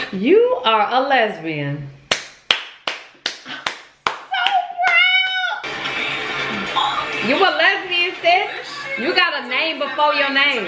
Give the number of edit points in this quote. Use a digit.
1